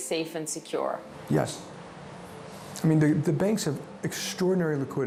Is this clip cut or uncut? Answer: uncut